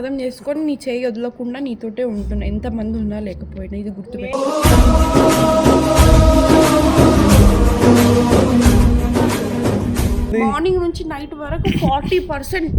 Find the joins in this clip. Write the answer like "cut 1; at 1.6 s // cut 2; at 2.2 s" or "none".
cut 1; at 10.3 s